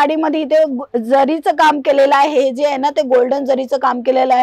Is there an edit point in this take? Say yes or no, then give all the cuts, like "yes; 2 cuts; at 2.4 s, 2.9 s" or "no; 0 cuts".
no; 0 cuts